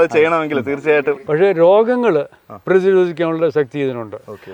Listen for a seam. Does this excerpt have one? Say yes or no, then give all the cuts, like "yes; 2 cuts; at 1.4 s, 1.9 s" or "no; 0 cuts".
yes; 1 cut; at 1.2 s